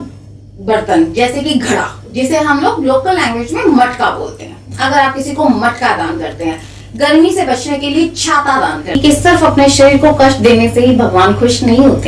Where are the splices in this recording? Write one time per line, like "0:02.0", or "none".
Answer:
0:09.0